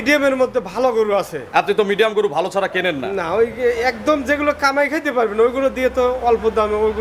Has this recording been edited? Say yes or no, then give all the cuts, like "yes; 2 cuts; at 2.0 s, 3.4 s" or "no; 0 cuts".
no; 0 cuts